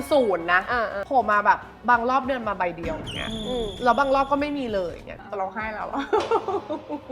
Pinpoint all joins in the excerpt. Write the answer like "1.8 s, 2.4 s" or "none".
1.0 s, 5.0 s